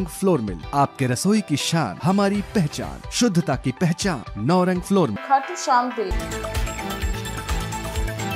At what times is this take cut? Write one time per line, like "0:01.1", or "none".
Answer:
none